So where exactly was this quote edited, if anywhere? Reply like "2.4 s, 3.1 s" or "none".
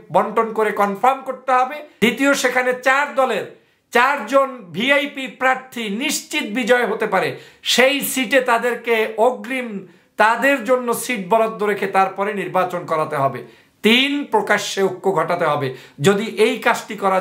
1.8 s